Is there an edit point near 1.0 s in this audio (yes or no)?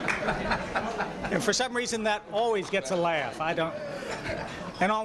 yes